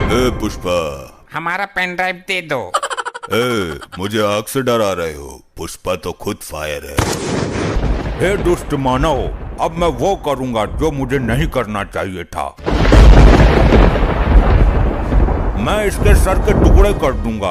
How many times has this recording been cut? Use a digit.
3